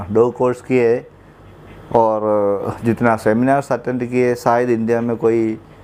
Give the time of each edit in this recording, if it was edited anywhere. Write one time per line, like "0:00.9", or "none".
none